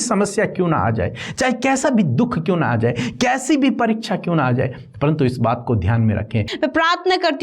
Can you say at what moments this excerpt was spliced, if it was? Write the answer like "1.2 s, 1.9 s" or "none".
6.5 s

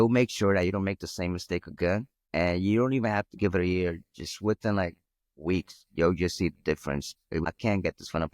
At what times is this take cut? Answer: 2.2 s, 7.4 s

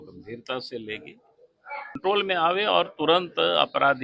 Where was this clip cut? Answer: 2.0 s

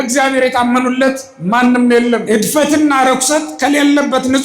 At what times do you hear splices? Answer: 2.2 s

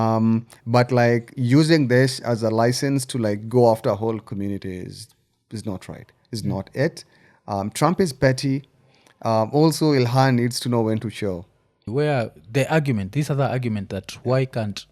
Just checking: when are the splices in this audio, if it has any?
11.8 s

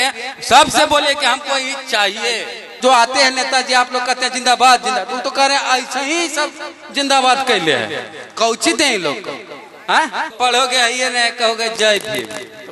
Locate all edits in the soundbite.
2.7 s, 10.3 s

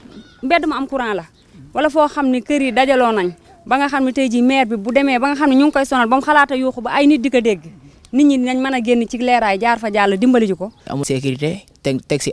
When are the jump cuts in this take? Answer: 10.9 s

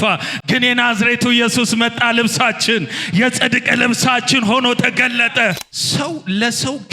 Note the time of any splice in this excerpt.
5.7 s

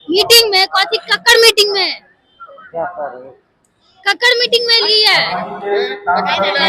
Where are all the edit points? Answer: none

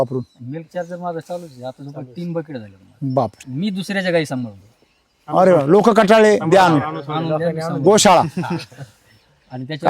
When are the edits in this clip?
3.5 s

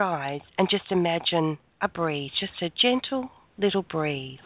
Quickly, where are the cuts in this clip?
1.7 s

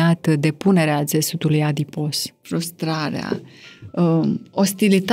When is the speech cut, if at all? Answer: 2.3 s

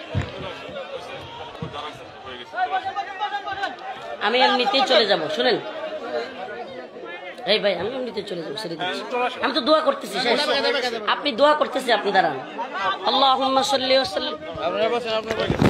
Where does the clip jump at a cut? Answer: 1.5 s

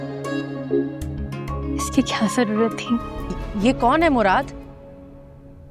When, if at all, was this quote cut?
3.3 s

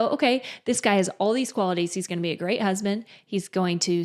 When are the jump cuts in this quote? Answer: none

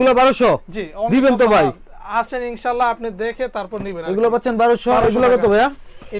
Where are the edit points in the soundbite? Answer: none

